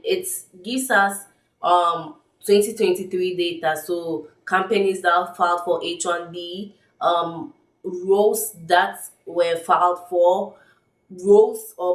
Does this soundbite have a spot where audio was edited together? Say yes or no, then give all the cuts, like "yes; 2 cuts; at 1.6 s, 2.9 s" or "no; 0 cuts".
no; 0 cuts